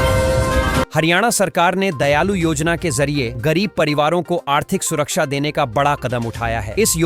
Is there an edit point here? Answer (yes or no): yes